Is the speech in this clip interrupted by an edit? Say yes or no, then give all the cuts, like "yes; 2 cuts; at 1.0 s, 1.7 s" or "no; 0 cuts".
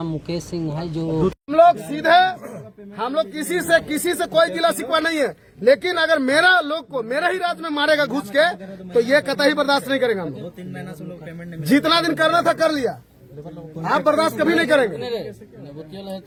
no; 0 cuts